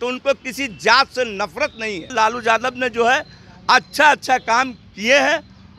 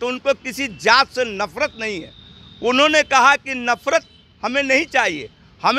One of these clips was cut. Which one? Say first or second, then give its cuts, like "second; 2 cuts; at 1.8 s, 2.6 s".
first; 1 cut; at 2.1 s